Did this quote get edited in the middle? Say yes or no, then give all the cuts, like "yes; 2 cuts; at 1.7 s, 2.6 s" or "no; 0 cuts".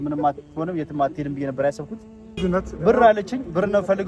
yes; 1 cut; at 2.3 s